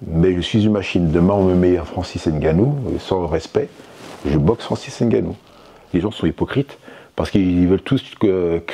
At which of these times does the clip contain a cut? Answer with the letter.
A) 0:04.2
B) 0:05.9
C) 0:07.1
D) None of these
B